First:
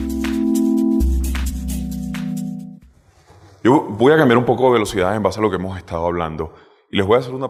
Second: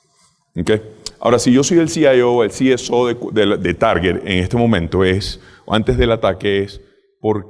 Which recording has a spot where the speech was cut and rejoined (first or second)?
second